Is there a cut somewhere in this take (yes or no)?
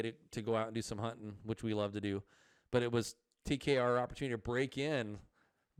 no